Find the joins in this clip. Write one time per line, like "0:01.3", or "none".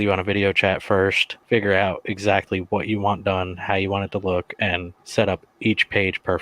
0:01.3
0:04.9

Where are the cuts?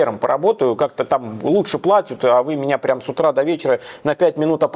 none

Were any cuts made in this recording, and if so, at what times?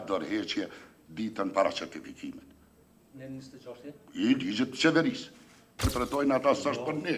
0:05.9

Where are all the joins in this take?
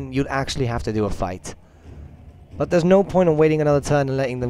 0:03.5

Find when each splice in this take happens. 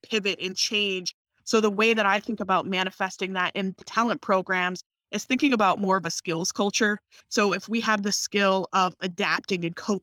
0:01.2
0:03.9
0:07.1

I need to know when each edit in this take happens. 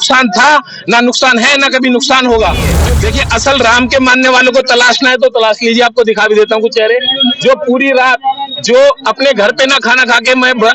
0:02.8

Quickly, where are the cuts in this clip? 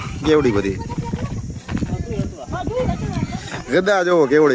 none

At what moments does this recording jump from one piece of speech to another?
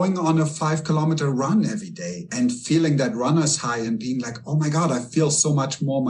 none

